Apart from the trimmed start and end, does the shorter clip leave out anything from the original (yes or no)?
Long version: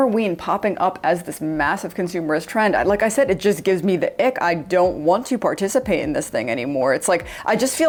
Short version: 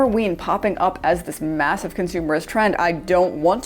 yes